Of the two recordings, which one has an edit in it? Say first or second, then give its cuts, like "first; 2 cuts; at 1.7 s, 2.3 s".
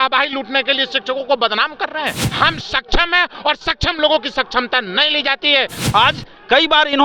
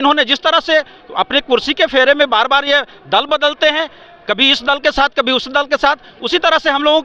first; 2 cuts; at 2.2 s, 5.8 s